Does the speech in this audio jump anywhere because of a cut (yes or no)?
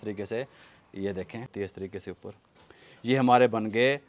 yes